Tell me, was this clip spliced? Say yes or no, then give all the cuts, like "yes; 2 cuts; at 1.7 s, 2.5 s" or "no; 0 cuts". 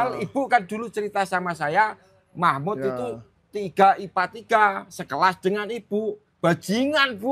no; 0 cuts